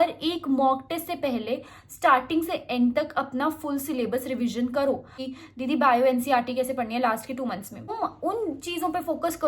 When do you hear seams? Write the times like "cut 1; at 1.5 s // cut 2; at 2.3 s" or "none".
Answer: cut 1; at 5.2 s // cut 2; at 7.9 s